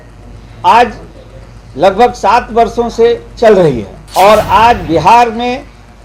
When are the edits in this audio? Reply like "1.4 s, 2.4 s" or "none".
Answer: 3.9 s

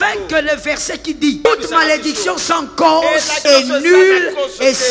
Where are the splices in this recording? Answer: 1.4 s, 3.3 s

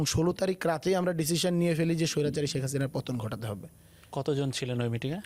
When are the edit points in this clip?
none

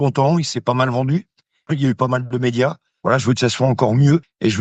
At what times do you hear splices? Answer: 2.9 s

